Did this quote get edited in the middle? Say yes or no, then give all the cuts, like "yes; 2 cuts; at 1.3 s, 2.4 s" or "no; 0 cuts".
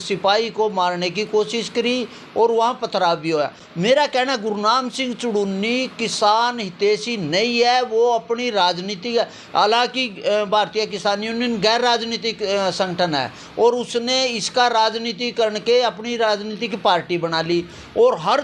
no; 0 cuts